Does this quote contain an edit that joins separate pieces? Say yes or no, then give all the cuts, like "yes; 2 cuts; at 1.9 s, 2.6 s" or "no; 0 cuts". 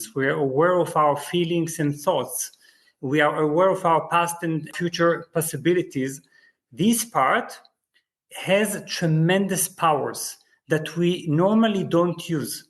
yes; 1 cut; at 4.7 s